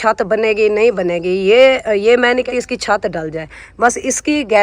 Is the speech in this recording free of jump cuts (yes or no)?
no